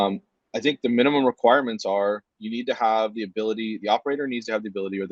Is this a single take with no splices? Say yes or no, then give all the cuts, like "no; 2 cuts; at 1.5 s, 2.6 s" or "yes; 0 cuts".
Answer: yes; 0 cuts